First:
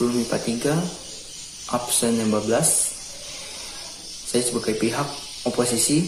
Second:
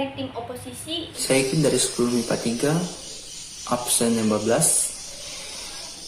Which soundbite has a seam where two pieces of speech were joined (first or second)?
second